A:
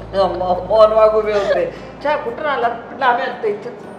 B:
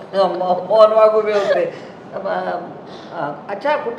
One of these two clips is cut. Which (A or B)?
A